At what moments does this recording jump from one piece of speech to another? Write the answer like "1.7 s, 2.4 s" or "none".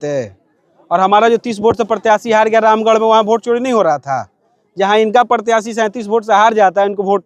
none